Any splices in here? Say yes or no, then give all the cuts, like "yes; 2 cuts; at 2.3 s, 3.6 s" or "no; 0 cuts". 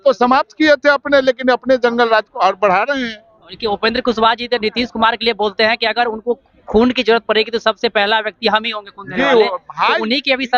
no; 0 cuts